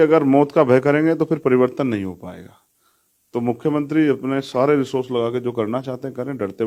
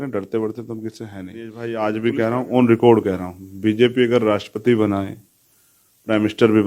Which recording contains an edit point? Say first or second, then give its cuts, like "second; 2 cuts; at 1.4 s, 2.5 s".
second; 1 cut; at 1.6 s